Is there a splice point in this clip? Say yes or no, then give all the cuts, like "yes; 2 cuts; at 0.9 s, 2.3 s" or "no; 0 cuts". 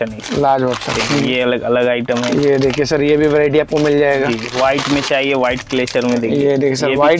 no; 0 cuts